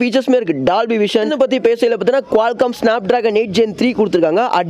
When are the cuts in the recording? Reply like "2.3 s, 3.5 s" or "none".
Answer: 1.3 s